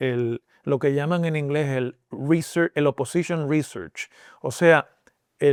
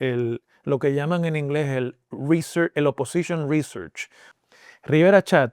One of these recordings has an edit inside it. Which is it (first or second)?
second